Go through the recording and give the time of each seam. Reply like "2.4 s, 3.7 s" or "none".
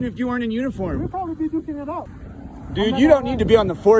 2.1 s

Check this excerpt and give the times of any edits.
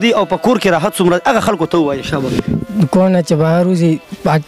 2.6 s

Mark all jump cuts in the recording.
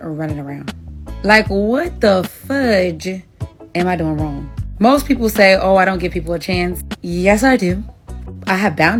none

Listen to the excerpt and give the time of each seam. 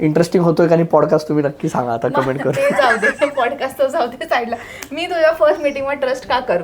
none

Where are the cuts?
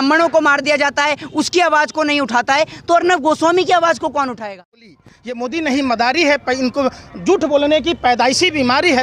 5.0 s

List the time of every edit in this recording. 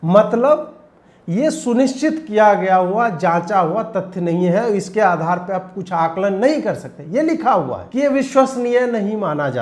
7.8 s

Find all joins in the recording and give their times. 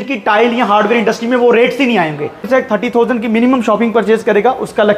2.5 s

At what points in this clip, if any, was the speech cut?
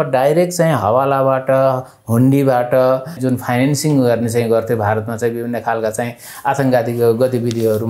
3.2 s

